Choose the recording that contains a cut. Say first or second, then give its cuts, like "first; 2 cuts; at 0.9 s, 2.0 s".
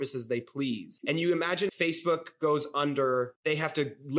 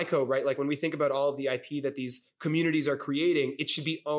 first; 3 cuts; at 0.9 s, 1.7 s, 3.4 s